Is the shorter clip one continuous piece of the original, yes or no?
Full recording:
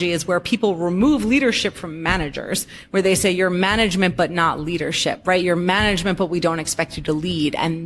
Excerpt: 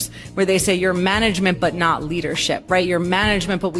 yes